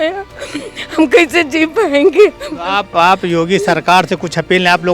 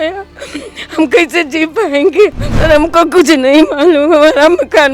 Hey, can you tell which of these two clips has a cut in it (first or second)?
second